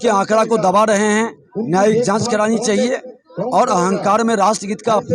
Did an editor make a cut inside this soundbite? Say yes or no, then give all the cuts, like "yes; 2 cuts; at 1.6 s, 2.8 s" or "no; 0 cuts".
no; 0 cuts